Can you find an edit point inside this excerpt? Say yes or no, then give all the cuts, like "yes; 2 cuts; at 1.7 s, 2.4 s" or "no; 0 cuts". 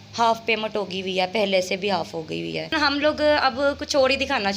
yes; 1 cut; at 2.7 s